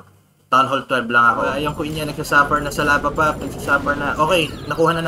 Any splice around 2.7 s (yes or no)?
no